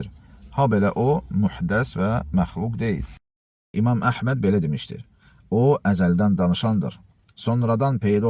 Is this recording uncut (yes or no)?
no